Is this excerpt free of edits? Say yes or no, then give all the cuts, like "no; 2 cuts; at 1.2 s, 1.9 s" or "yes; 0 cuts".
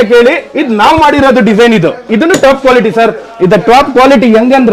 no; 1 cut; at 2.1 s